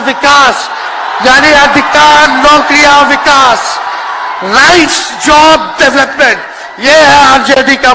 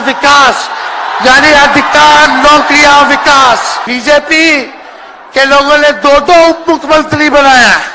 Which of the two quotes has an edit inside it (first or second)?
second